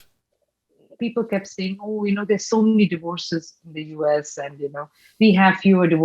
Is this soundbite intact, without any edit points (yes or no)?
no